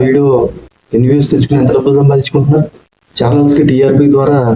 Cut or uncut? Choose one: uncut